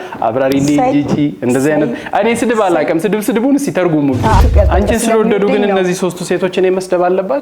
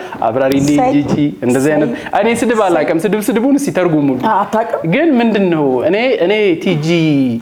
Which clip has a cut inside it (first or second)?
first